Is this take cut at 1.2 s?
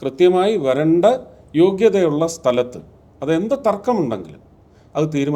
no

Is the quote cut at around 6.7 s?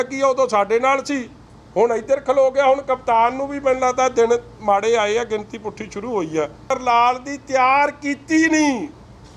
yes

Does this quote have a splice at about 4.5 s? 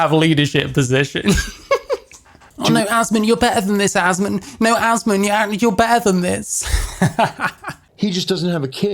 no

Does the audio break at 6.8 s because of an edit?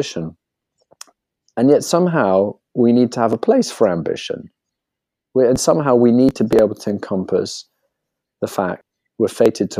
no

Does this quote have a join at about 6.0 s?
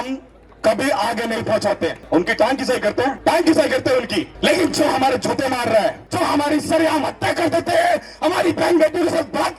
yes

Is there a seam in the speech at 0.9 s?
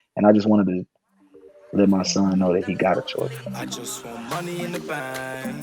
no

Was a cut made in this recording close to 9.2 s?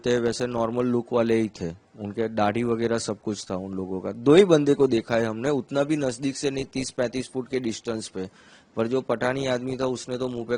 no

